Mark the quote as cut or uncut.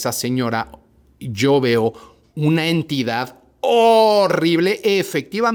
uncut